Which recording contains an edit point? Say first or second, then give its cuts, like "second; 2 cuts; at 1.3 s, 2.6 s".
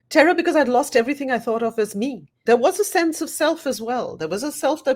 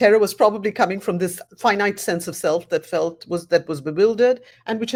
first; 1 cut; at 2.3 s